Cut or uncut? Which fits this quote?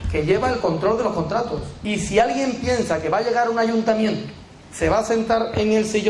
cut